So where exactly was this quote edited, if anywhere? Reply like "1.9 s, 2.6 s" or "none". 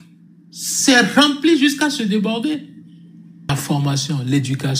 3.5 s